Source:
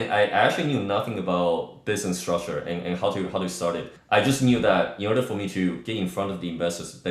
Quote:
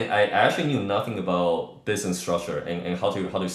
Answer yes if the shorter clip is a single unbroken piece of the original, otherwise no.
yes